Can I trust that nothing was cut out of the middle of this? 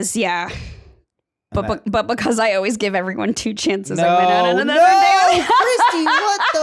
yes; 0 cuts

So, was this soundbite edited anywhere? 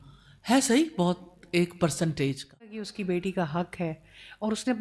yes; 1 cut; at 2.7 s

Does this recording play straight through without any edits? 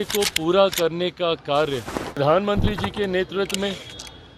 no; 1 cut; at 2.2 s

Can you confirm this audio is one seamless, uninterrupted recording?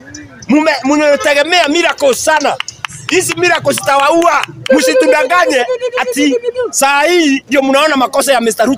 no; 1 cut; at 4.7 s

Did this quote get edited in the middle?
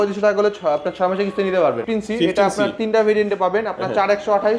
yes; 1 cut; at 1.8 s

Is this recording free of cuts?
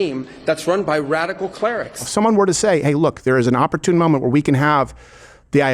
no; 1 cut; at 2.1 s

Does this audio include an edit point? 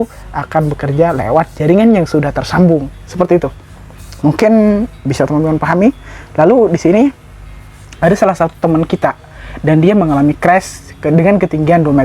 no; 0 cuts

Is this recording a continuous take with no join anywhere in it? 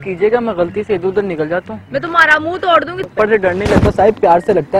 no; 1 cut; at 3.1 s

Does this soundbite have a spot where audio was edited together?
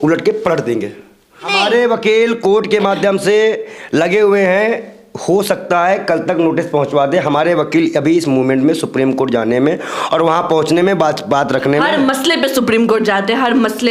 no; 0 cuts

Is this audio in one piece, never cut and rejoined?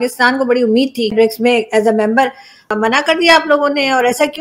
no; 2 cuts; at 1.1 s, 2.6 s

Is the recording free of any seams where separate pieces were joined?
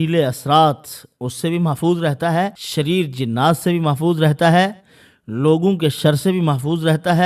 no; 1 cut; at 2.6 s

